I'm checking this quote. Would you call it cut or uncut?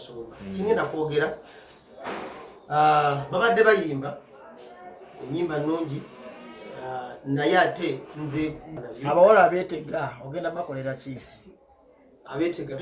cut